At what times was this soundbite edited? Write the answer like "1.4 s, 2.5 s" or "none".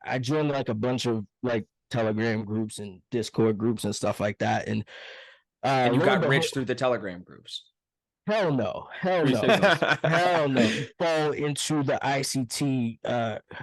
10.9 s